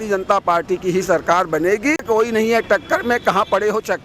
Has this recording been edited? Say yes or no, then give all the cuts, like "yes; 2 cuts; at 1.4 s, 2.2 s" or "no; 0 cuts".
yes; 1 cut; at 2.0 s